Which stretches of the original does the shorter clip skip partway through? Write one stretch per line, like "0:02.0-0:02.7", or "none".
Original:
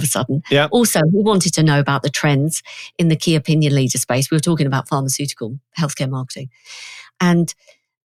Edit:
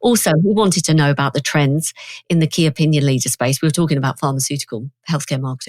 none